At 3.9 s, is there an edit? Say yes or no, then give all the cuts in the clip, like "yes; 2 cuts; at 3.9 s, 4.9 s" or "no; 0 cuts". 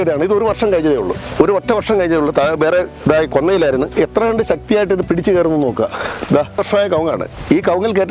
yes; 2 cuts; at 3.9 s, 6.5 s